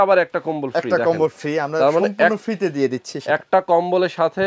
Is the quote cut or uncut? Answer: uncut